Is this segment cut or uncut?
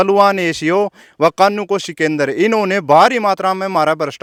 uncut